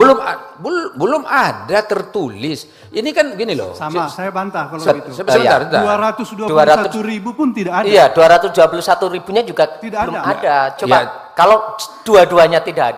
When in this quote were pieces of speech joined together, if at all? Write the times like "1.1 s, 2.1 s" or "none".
none